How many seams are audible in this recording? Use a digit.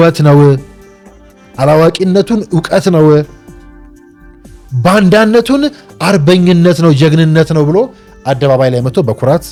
0